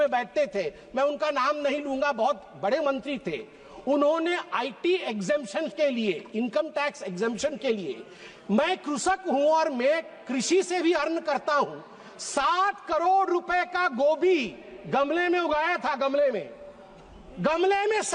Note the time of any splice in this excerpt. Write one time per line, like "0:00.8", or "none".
none

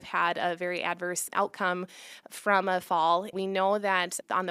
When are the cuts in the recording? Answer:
0:03.3

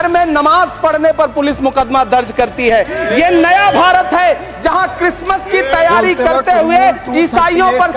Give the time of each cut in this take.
none

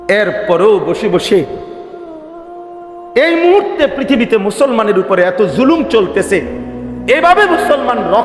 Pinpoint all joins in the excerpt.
0:01.5
0:03.1

